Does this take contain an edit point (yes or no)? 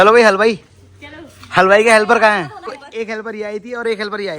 yes